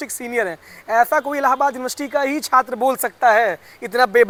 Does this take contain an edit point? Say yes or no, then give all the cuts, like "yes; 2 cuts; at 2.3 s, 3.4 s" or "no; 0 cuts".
no; 0 cuts